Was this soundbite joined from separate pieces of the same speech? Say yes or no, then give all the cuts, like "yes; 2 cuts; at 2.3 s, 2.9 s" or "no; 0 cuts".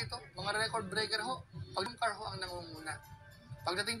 yes; 1 cut; at 1.9 s